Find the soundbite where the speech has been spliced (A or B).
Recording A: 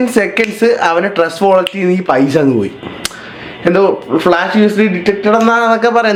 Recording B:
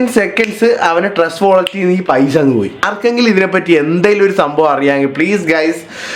B